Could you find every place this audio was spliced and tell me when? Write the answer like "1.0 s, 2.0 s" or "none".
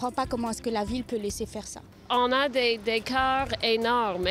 2.1 s

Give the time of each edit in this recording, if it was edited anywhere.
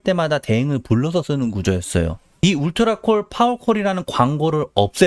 2.4 s

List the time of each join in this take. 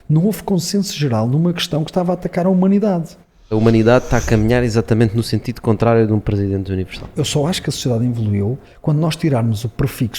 3.5 s, 7.0 s

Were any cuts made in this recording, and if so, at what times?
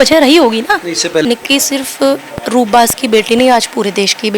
1.2 s

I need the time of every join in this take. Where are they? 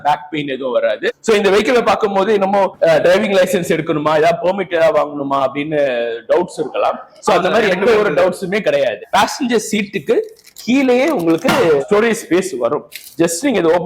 1.1 s, 9.0 s

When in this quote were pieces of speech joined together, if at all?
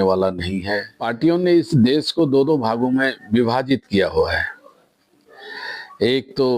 1.1 s

